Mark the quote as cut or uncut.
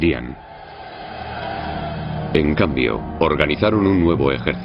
cut